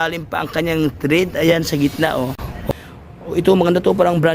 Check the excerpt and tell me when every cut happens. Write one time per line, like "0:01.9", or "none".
0:02.7